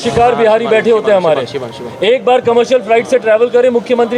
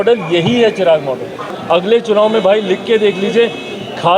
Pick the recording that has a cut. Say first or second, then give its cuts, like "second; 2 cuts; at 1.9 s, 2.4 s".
second; 1 cut; at 1.5 s